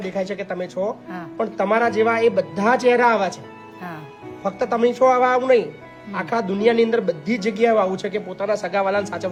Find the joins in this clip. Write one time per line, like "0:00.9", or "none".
none